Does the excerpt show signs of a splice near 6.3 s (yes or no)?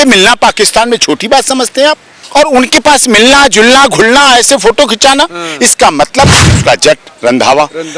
yes